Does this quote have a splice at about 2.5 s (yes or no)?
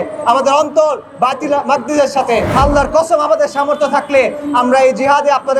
yes